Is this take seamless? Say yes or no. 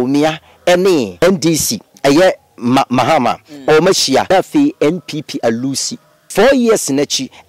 no